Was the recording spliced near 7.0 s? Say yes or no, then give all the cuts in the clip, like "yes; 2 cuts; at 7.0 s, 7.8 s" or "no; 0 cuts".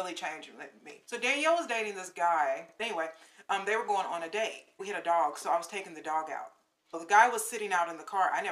yes; 4 cuts; at 0.9 s, 3.1 s, 4.8 s, 7.0 s